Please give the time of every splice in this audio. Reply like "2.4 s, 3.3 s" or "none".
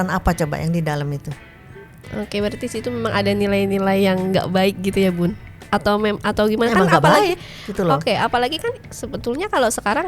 none